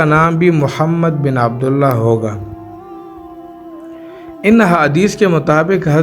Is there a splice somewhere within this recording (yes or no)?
yes